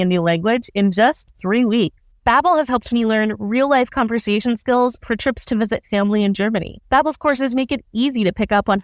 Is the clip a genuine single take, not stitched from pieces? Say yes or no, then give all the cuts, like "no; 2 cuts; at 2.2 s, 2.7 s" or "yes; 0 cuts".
no; 1 cut; at 2.1 s